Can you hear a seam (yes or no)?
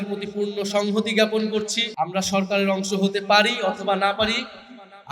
yes